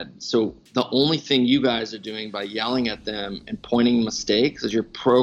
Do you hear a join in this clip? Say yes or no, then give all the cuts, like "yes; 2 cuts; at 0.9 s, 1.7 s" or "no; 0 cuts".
no; 0 cuts